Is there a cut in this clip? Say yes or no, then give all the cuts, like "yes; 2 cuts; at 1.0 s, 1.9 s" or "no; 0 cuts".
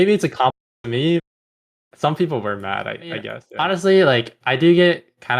yes; 1 cut; at 3.4 s